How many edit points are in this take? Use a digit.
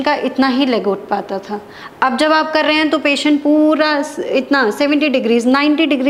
0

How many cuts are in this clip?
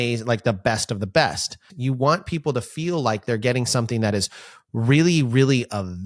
1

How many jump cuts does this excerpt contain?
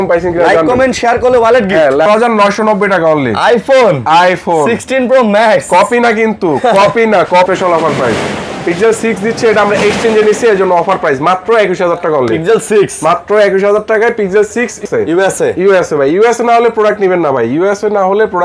3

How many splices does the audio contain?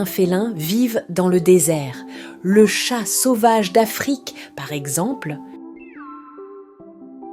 1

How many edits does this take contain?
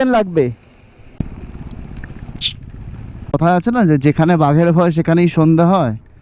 2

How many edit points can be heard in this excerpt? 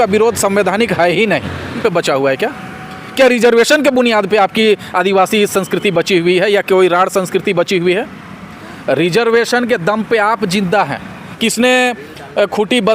2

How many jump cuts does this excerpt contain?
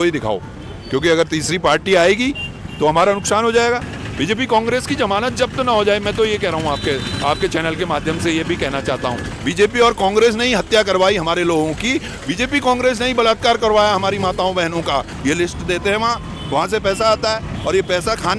3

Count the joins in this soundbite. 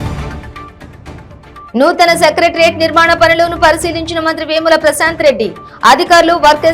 1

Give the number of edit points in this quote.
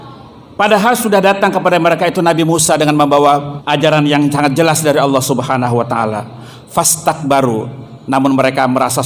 1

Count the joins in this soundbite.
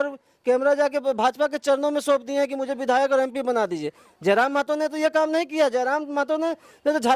0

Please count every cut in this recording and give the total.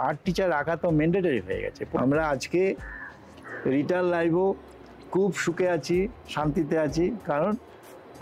1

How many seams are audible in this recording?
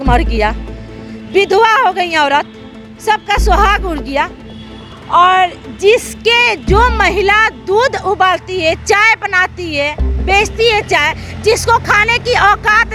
0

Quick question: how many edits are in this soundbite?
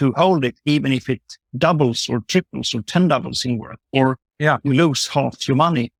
0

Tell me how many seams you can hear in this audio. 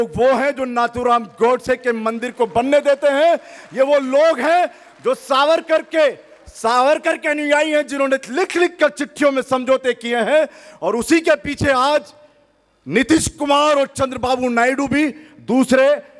0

